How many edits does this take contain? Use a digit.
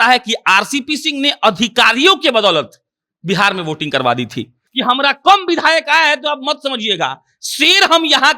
1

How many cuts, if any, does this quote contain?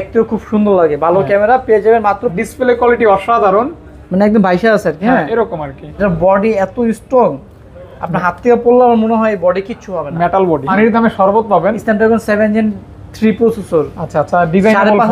3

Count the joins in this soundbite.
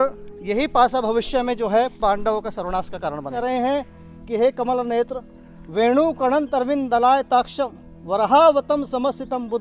1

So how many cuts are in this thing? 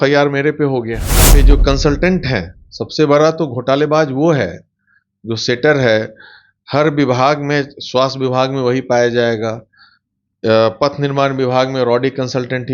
1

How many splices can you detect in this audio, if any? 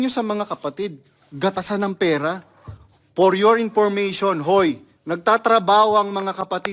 1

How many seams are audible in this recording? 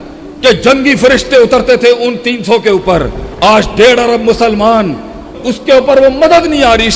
1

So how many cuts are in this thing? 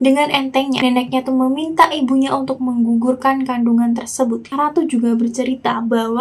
1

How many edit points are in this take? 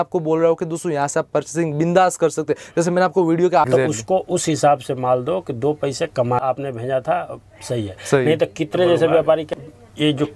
3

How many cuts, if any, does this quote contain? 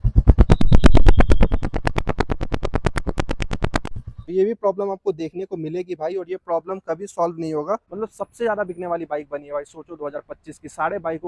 2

